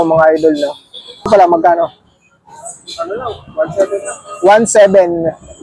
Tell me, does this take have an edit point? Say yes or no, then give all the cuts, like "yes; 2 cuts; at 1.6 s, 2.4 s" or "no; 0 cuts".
yes; 1 cut; at 1.3 s